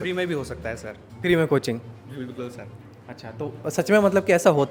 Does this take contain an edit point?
no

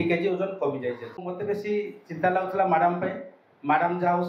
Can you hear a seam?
yes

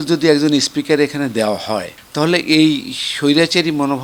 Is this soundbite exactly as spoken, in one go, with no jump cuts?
yes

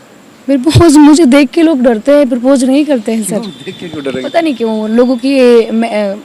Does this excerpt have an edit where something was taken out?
no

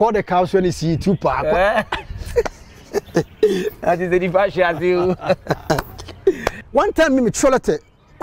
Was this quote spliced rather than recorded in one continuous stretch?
yes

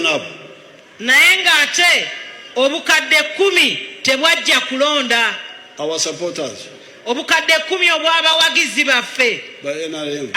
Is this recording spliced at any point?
no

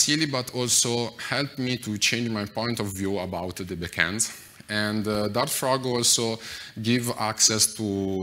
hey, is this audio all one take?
yes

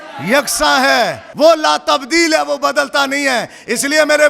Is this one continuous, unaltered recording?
no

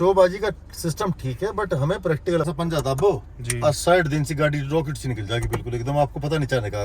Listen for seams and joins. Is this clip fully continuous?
no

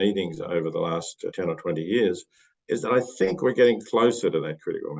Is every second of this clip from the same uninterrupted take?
yes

